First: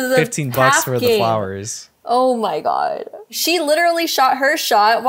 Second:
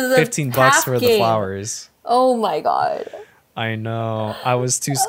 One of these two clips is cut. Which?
first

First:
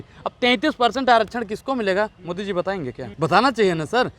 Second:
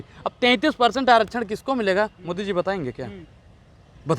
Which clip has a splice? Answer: first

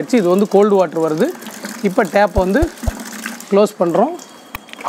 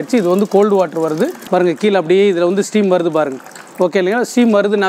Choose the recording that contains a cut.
second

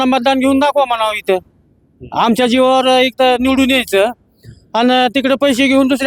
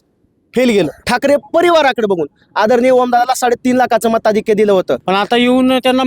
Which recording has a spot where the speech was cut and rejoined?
second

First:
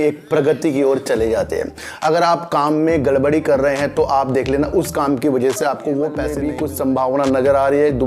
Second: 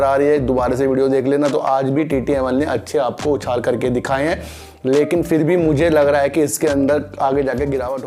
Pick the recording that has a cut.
first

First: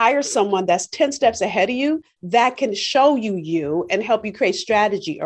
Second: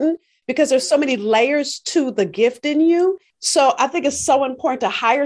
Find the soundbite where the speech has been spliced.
second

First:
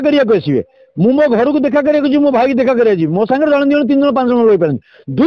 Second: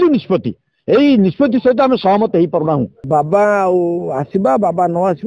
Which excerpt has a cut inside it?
second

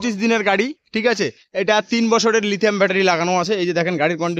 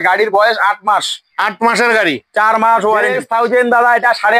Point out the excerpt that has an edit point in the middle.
second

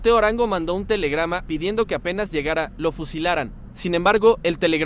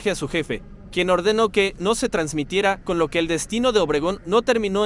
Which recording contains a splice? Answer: first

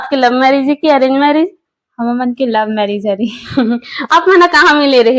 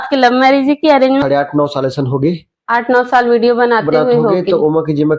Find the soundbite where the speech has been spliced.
second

